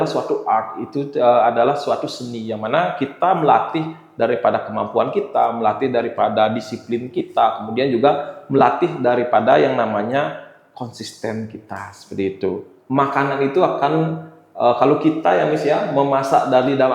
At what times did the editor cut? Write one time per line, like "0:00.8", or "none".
0:12.7

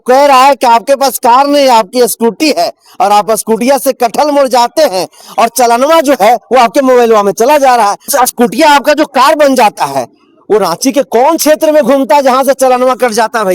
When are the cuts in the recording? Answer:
0:08.1

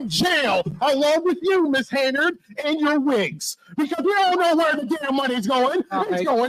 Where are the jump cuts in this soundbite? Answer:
none

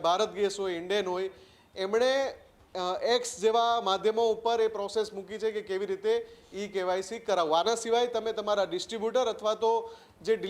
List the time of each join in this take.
none

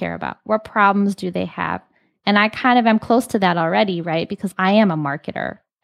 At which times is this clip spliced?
0:04.5

